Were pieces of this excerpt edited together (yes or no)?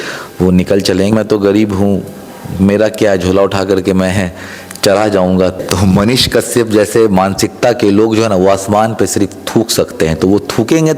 yes